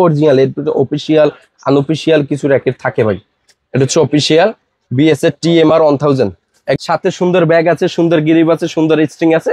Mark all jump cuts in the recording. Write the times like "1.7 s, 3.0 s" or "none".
6.7 s